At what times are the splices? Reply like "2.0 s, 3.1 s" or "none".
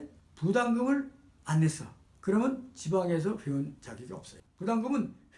4.4 s